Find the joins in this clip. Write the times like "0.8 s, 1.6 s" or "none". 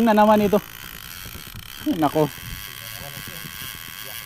none